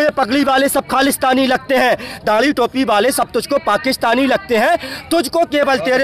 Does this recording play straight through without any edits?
yes; 0 cuts

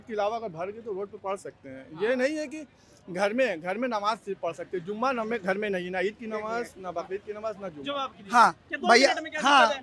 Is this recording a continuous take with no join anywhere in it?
yes; 0 cuts

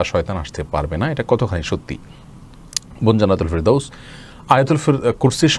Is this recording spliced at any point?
no; 0 cuts

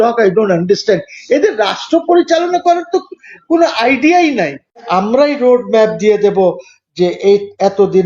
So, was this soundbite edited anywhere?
yes; 1 cut; at 4.8 s

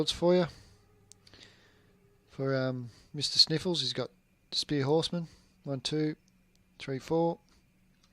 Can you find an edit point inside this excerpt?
yes; 1 cut; at 3.7 s

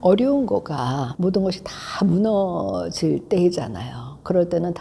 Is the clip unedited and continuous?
yes; 0 cuts

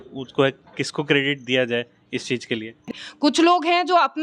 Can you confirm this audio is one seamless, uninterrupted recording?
no; 1 cut; at 2.8 s

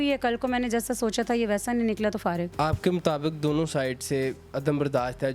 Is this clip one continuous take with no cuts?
no; 1 cut; at 2.5 s

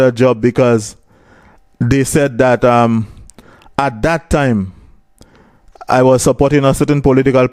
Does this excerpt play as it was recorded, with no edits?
yes; 0 cuts

